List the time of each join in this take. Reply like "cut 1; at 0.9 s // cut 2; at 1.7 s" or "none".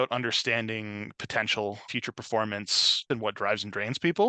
cut 1; at 1.9 s // cut 2; at 3.0 s